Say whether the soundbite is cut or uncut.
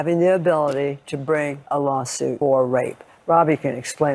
cut